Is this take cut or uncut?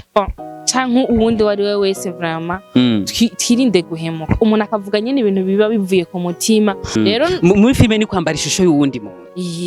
cut